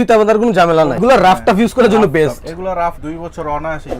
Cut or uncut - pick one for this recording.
cut